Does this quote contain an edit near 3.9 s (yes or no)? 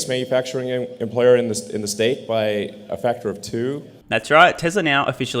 no